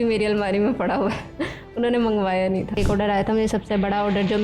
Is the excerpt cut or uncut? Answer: cut